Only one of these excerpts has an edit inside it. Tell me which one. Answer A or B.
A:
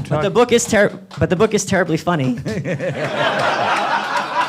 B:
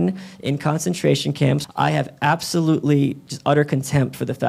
B